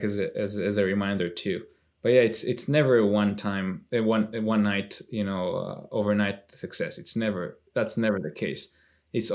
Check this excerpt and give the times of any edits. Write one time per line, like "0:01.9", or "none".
none